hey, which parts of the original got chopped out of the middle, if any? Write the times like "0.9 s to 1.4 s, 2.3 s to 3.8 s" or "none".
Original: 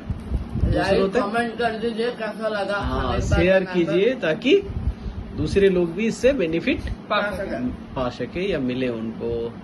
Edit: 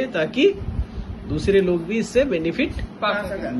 none